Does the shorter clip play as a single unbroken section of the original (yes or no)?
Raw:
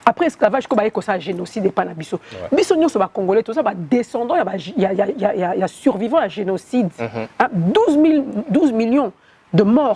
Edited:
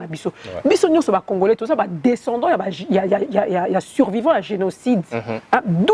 yes